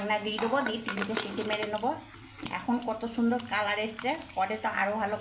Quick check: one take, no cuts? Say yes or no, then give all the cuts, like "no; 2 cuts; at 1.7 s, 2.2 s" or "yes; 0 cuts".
yes; 0 cuts